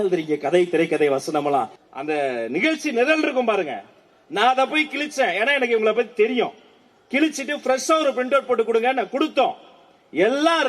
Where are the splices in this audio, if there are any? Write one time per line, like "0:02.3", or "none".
0:01.8